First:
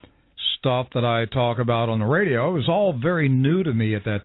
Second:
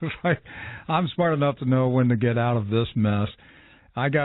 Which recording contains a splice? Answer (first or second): first